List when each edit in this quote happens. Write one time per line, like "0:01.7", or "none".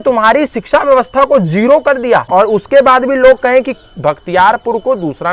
0:02.3